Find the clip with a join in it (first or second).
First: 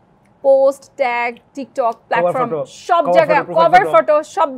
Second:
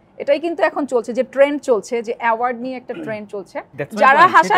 second